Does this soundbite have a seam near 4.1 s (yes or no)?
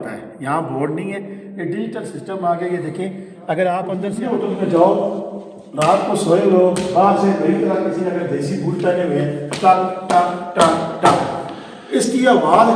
yes